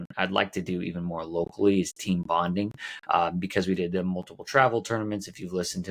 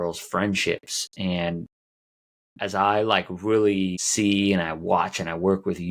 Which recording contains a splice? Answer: second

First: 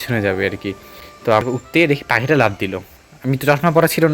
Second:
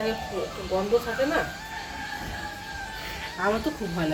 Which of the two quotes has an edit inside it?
first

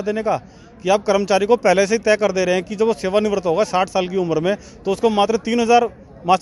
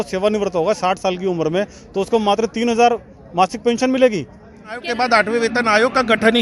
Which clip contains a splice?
second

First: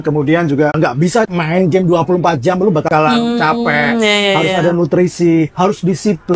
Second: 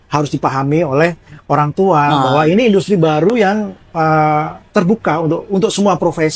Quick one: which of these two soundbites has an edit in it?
first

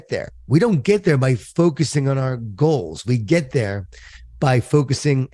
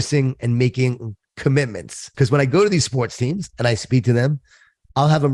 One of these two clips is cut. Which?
second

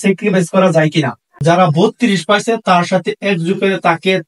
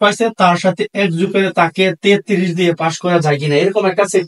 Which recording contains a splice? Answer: first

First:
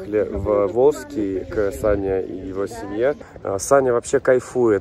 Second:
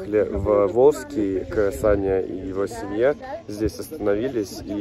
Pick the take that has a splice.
first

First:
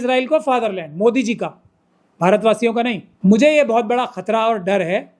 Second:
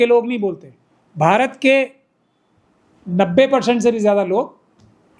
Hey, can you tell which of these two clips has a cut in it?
first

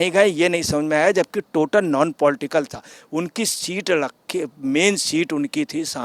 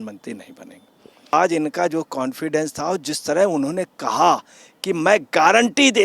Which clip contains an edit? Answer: second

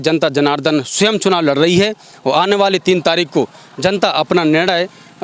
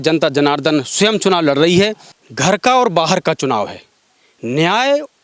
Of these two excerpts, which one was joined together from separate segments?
second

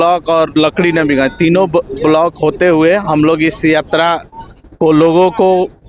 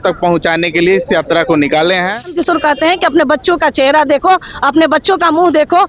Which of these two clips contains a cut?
second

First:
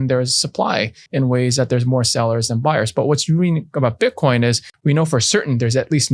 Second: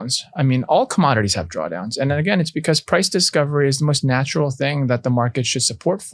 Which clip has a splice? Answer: first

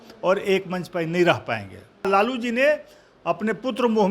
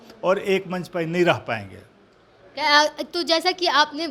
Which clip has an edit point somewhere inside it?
first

